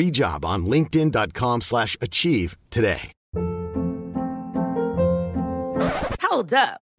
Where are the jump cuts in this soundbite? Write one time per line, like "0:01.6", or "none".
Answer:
0:03.2